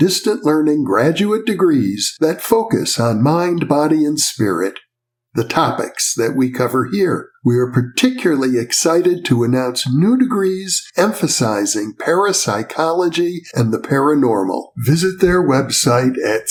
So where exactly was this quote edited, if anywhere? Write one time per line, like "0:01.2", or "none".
none